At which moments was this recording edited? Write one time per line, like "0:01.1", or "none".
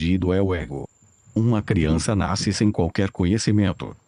none